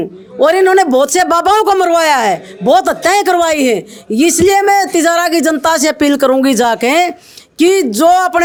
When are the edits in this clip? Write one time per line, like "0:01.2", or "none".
none